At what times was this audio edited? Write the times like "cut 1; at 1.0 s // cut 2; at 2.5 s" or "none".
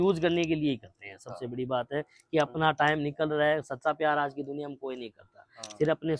none

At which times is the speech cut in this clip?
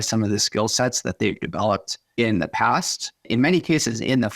cut 1; at 2.0 s // cut 2; at 3.3 s

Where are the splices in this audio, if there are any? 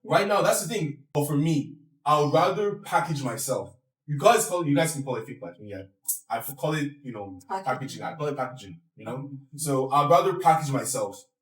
cut 1; at 1.0 s

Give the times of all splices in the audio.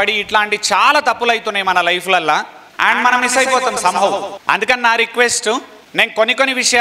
cut 1; at 2.6 s // cut 2; at 4.3 s // cut 3; at 5.8 s

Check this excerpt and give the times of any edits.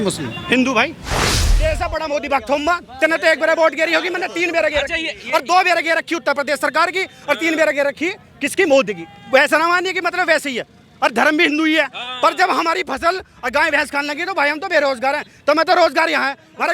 cut 1; at 1.4 s

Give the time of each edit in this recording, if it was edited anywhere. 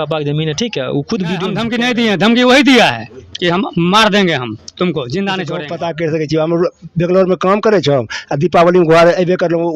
cut 1; at 1.6 s // cut 2; at 5.6 s

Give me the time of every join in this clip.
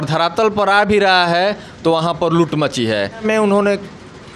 cut 1; at 3.2 s

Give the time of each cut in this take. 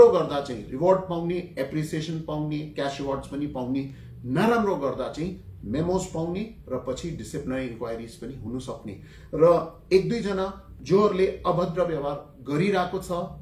none

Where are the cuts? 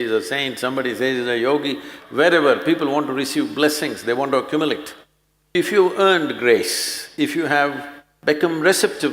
cut 1; at 5.5 s

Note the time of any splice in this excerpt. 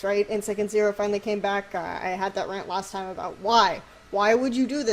cut 1; at 3.3 s

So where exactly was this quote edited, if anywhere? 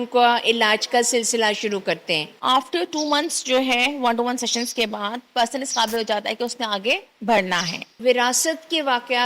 cut 1; at 2.3 s // cut 2; at 7.8 s

